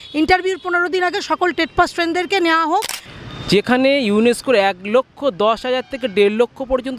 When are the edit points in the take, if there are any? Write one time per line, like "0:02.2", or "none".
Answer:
0:03.0